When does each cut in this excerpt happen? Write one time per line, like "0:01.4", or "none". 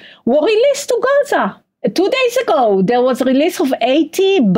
0:01.6

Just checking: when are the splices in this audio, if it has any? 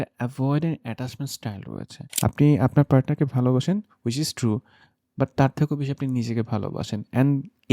0:02.0

